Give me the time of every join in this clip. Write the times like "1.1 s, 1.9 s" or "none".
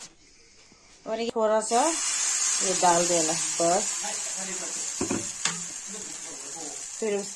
1.2 s